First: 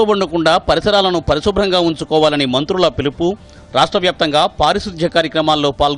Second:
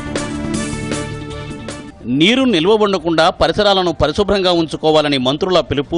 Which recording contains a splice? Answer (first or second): second